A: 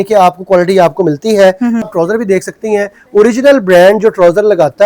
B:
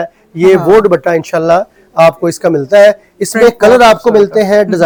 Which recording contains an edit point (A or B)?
A